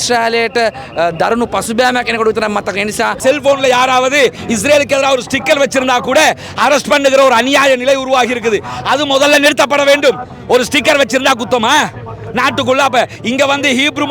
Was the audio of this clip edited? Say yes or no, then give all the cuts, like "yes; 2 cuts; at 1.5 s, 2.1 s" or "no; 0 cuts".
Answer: yes; 1 cut; at 3.2 s